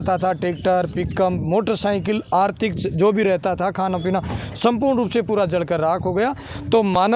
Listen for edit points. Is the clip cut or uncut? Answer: uncut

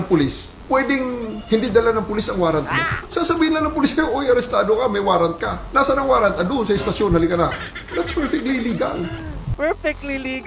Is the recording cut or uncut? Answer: cut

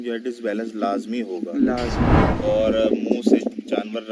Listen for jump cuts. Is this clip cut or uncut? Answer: cut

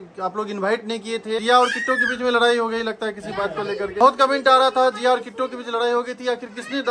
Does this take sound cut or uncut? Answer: cut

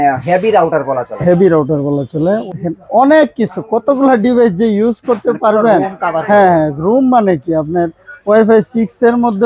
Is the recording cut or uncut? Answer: cut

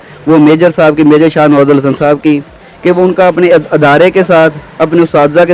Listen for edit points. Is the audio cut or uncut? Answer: uncut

